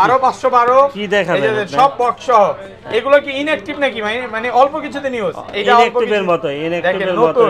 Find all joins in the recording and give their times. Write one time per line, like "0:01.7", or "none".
none